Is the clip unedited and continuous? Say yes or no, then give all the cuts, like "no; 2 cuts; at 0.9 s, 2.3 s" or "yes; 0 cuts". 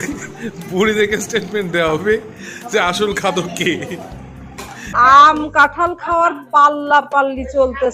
no; 1 cut; at 4.8 s